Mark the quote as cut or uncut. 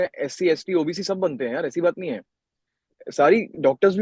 uncut